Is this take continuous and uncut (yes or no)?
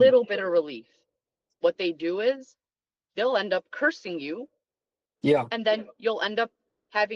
yes